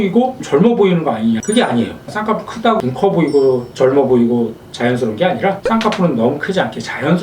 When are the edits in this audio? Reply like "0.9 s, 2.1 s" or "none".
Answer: 1.4 s, 2.1 s